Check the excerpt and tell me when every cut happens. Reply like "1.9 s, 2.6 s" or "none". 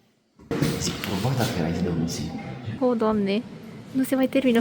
2.6 s